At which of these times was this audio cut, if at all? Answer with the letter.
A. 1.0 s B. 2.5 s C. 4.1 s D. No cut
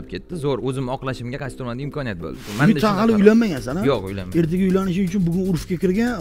B